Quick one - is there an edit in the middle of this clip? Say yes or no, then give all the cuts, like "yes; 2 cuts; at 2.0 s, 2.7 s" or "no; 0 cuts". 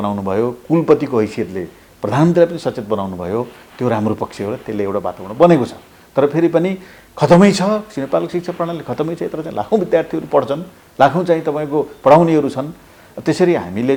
no; 0 cuts